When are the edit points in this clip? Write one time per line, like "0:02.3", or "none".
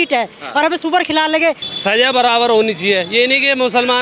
0:01.7